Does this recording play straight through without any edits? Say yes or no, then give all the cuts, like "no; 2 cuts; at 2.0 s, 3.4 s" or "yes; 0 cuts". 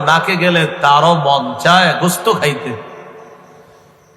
yes; 0 cuts